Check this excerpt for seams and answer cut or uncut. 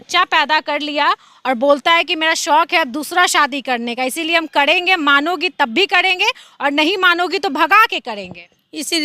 uncut